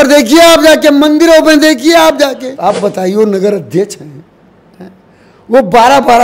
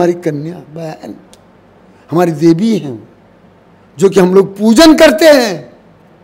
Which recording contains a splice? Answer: first; 1 cut; at 2.5 s

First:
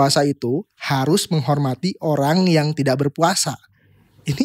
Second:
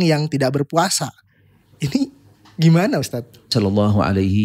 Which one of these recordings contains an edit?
second; 1 cut; at 3.5 s

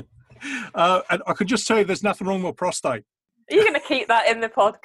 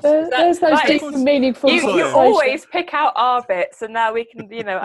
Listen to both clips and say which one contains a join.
first; 1 cut; at 3.3 s

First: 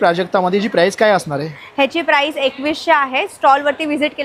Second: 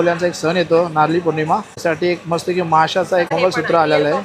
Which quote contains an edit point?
second; 2 cuts; at 1.7 s, 3.3 s

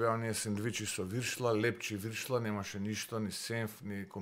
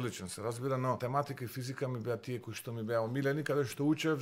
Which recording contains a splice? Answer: second; 1 cut; at 1.0 s

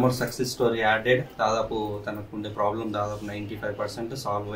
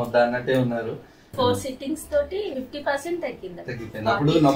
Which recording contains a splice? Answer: second; 2 cuts; at 1.4 s, 2.5 s

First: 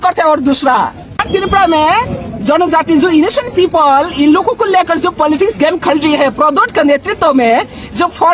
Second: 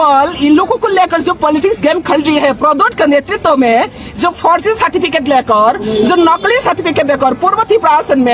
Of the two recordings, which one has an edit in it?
first; 1 cut; at 1.2 s

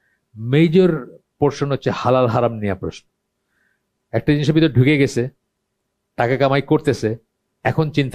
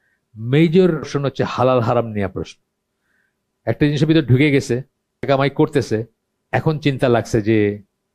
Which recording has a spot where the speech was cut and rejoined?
second; 2 cuts; at 1.1 s, 5.2 s

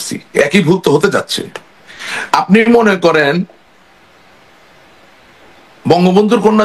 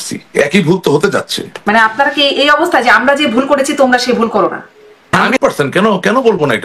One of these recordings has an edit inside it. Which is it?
second; 2 cuts; at 1.6 s, 5.2 s

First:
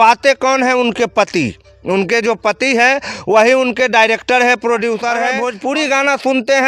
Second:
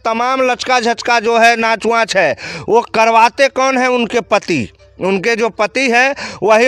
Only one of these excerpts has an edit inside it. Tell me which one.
first; 1 cut; at 5.3 s

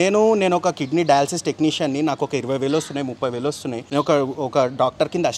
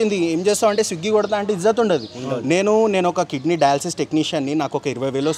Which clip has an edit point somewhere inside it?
first; 1 cut; at 3.8 s

